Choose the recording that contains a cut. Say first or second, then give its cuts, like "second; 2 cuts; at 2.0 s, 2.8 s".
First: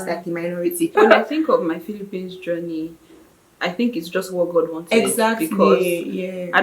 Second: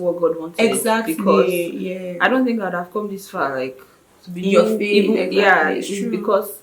first; 1 cut; at 0.9 s